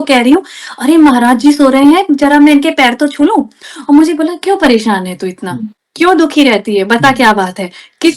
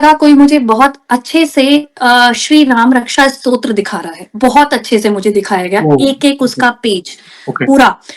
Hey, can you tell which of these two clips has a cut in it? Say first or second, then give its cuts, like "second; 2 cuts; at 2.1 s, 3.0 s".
first; 1 cut; at 3.7 s